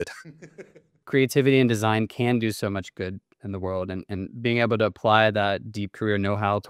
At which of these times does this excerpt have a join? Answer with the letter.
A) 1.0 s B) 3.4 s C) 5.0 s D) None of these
A